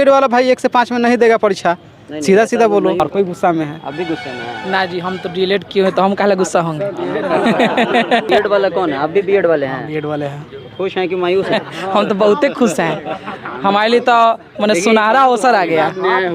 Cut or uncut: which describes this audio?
cut